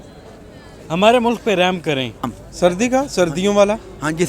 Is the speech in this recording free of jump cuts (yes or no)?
no